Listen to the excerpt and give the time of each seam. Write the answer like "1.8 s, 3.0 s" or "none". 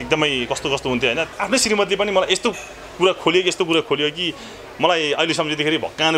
1.3 s